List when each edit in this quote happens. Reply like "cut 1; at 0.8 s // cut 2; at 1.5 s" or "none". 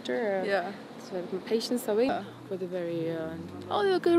cut 1; at 2.1 s